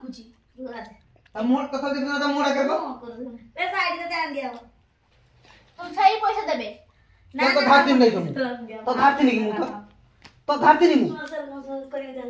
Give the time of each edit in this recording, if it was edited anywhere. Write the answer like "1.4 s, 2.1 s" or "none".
11.2 s